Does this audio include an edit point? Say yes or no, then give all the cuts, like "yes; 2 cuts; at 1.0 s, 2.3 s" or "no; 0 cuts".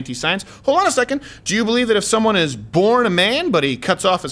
no; 0 cuts